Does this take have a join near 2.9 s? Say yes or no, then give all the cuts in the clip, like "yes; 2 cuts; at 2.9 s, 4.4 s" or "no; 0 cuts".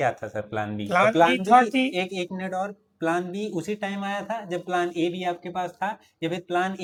no; 0 cuts